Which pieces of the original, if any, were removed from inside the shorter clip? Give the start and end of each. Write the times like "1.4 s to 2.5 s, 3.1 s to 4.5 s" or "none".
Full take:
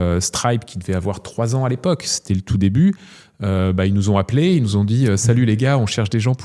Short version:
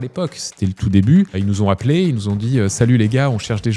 3.0 s to 3.8 s

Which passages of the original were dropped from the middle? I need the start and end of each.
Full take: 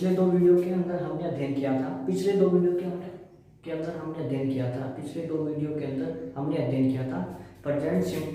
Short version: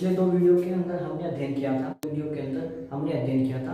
2.0 s to 5.5 s

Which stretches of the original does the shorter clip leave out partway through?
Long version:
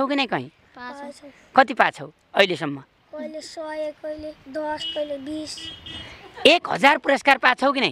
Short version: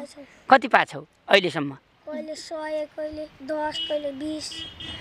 none

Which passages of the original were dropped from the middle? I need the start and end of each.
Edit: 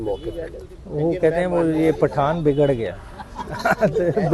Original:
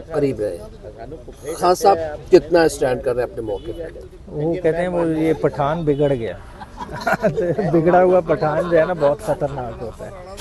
none

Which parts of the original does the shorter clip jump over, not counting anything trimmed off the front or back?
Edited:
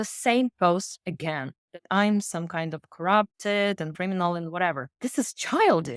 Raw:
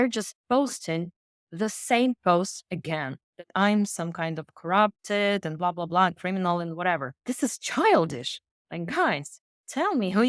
5.6 s to 6.2 s

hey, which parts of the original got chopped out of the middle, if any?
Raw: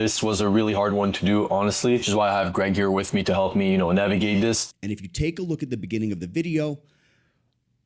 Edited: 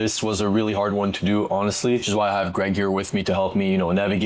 none

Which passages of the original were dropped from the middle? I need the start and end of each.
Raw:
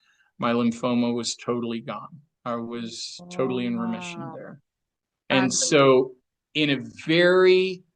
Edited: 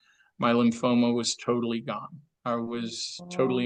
none

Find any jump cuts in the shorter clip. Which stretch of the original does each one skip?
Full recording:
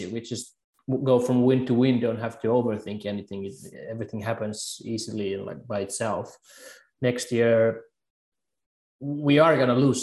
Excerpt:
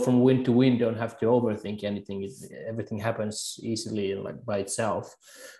none

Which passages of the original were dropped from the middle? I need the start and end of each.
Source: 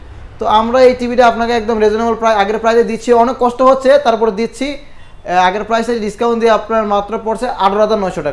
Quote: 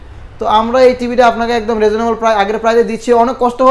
none

